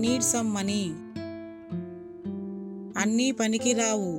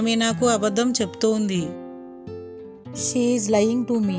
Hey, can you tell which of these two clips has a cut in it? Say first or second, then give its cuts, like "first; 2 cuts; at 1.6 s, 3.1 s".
first; 2 cuts; at 1.2 s, 2.9 s